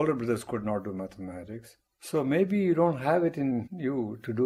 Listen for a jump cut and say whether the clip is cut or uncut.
uncut